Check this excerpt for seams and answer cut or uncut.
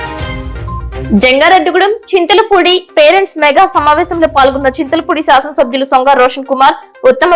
uncut